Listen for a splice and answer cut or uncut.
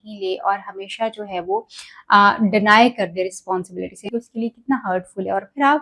cut